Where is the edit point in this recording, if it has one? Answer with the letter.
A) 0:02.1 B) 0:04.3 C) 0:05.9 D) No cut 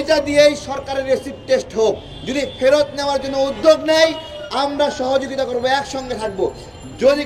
A